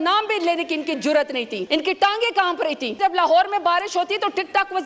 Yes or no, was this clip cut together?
yes